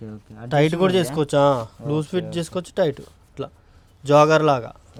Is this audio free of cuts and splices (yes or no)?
yes